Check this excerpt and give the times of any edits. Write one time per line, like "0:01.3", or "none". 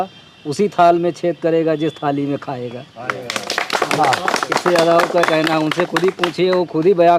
none